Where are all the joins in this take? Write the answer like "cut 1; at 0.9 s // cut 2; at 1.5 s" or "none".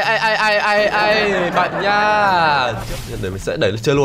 cut 1; at 2.8 s